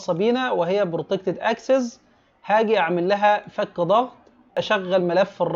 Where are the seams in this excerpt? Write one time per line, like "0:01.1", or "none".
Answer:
0:04.6